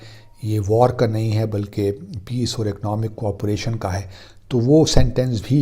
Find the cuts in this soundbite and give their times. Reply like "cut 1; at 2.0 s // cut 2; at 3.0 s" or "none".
none